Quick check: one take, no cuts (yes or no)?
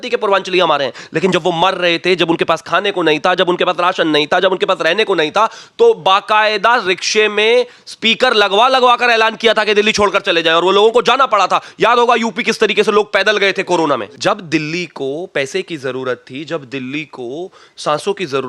no